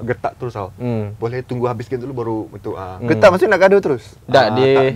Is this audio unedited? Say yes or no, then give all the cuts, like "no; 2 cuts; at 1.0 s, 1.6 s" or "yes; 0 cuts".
yes; 0 cuts